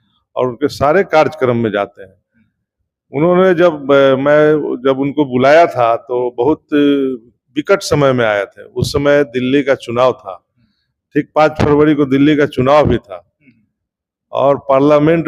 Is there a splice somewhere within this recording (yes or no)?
no